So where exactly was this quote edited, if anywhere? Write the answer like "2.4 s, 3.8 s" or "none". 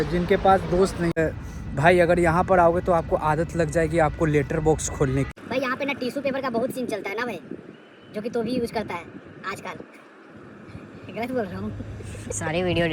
1.1 s, 5.4 s